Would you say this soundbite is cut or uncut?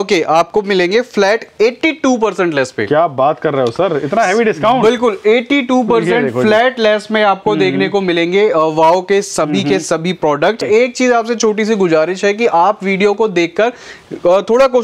uncut